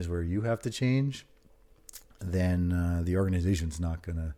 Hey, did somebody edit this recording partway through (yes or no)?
no